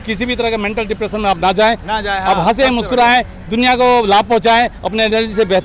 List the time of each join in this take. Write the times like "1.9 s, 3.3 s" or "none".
none